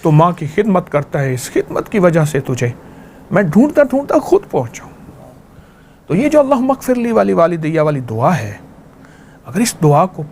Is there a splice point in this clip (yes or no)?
no